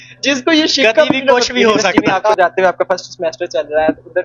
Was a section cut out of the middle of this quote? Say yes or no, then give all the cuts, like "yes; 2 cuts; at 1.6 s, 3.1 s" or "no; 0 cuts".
yes; 1 cut; at 2.2 s